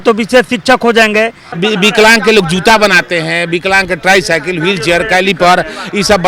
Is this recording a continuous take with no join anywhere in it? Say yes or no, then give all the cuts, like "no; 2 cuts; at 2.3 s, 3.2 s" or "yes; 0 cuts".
no; 1 cut; at 1.4 s